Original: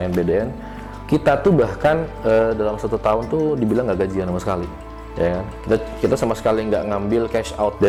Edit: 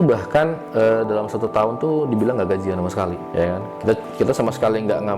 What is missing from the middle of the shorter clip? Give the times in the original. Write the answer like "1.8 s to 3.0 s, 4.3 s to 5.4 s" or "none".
4.7 s to 5.0 s